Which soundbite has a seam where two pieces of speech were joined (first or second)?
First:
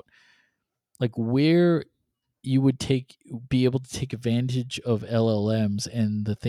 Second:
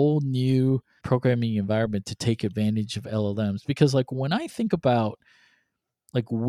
second